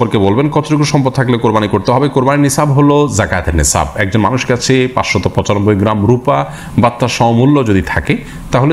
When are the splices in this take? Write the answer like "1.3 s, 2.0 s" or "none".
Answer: none